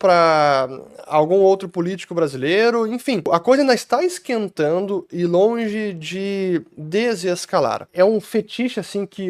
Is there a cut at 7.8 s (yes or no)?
yes